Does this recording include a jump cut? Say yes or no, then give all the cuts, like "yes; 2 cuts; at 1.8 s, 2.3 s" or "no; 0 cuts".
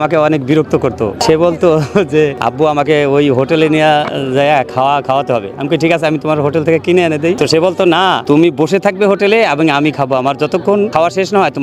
yes; 5 cuts; at 1.2 s, 2.4 s, 7.4 s, 8.2 s, 10.9 s